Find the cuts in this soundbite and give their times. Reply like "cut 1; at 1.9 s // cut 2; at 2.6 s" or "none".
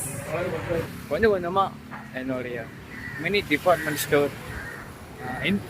cut 1; at 0.9 s